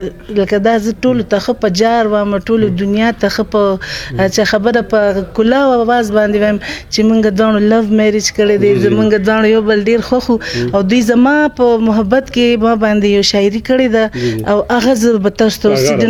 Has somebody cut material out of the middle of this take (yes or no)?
no